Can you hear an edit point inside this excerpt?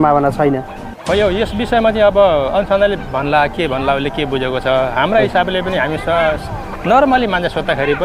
no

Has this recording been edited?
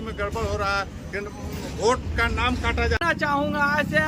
yes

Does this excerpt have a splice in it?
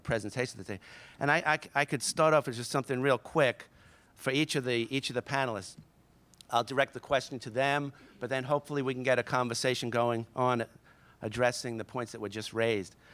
no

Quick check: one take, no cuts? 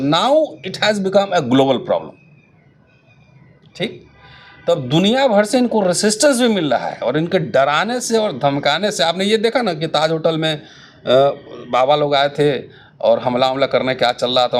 yes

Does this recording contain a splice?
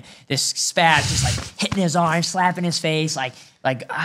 no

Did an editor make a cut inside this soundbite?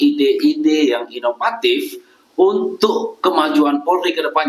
no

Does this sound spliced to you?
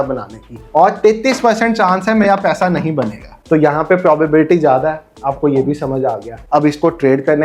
no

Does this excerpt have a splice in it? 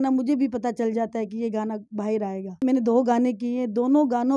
yes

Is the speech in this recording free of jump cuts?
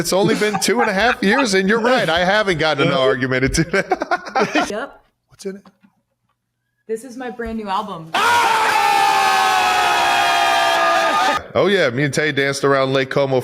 no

